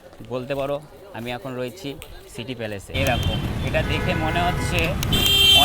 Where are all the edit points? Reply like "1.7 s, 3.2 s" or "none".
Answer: 2.9 s